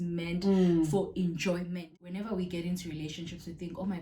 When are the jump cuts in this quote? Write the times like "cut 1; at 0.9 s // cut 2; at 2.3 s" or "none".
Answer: cut 1; at 1.8 s

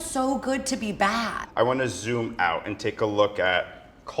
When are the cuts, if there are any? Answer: cut 1; at 1.4 s

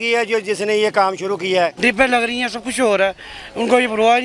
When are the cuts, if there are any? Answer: cut 1; at 1.8 s

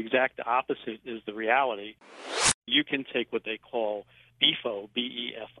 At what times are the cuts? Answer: cut 1; at 1.0 s // cut 2; at 2.3 s // cut 3; at 4.3 s

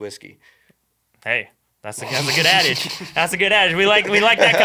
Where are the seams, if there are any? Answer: none

